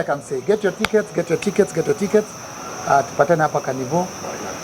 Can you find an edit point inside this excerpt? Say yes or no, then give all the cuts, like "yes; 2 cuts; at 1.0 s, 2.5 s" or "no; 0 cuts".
no; 0 cuts